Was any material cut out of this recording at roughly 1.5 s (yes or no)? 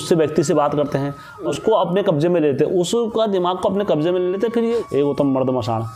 yes